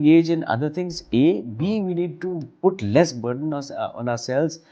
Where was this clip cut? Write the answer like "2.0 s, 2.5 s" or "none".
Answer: none